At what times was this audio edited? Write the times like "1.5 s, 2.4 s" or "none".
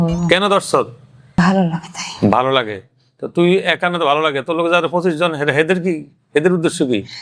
1.4 s

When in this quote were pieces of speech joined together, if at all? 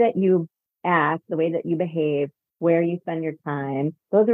none

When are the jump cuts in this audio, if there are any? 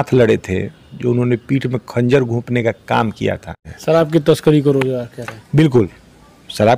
3.7 s

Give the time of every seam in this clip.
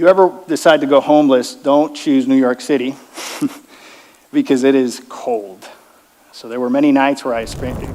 none

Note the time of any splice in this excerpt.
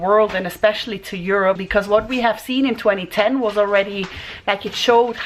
1.6 s

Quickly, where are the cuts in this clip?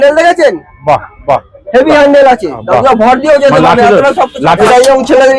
2.6 s, 4.6 s

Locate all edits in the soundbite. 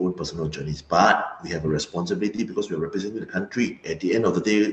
3.8 s

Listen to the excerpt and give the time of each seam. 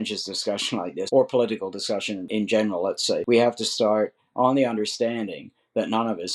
1.1 s, 2.3 s, 3.2 s

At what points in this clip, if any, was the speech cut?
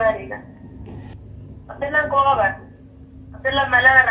1.2 s

